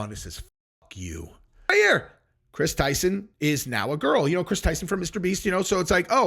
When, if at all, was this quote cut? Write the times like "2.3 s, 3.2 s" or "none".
1.7 s